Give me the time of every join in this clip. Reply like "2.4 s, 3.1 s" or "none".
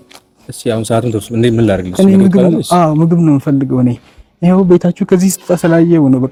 none